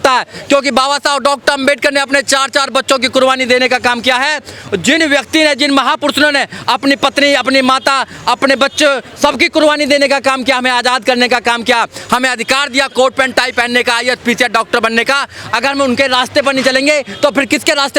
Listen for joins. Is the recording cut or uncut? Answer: uncut